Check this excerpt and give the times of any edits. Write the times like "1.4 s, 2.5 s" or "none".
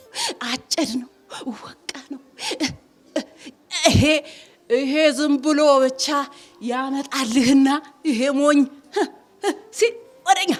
none